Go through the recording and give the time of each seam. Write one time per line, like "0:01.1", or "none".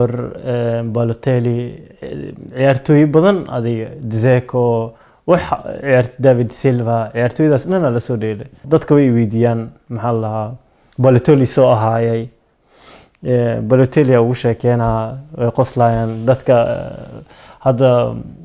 0:08.6